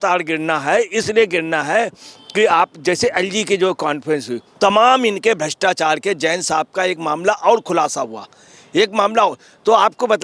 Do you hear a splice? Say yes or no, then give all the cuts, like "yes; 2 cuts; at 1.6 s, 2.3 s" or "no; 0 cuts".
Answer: no; 0 cuts